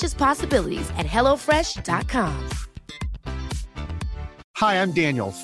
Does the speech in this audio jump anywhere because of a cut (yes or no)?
no